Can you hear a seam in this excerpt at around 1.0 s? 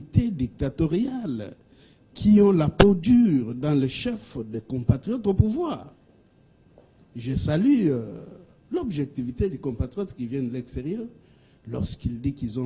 no; 0 cuts

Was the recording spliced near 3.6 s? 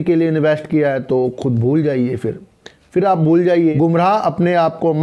yes; 1 cut; at 3.6 s

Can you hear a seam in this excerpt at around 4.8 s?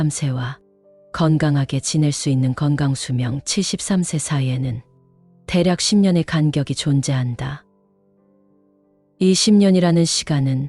no; 2 cuts; at 7.6 s, 9.0 s

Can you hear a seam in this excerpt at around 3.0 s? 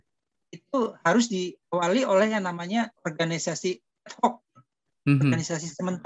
yes; 1 cut; at 3.0 s

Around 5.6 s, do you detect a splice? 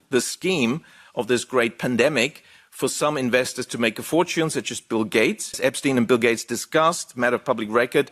yes; 1 cut; at 5.6 s

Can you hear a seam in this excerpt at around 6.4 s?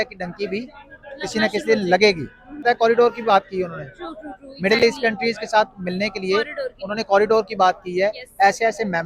no; 1 cut; at 2.6 s

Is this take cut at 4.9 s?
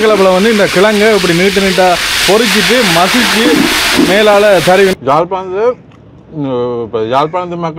yes; 1 cut; at 4.9 s

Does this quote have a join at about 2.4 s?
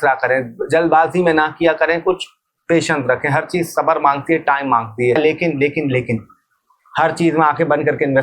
no; 1 cut; at 5.2 s

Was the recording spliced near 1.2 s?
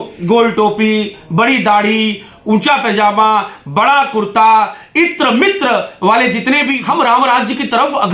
no; 1 cut; at 6.8 s

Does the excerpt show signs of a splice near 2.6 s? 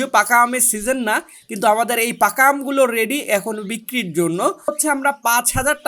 no; 1 cut; at 4.8 s

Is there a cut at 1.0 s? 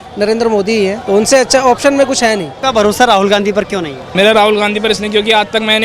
yes; 3 cuts; at 1.0 s, 2.5 s, 4.0 s

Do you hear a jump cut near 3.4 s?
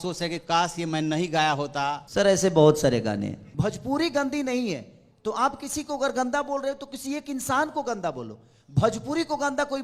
yes; 2 cuts; at 2.0 s, 3.4 s

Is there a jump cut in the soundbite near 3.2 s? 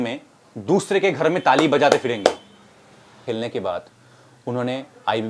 yes; 1 cut; at 3.2 s

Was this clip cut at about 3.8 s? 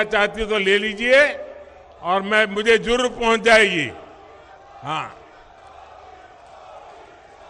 no; 0 cuts

